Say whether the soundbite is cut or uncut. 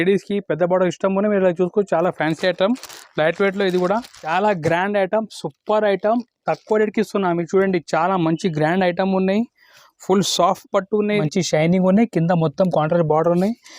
cut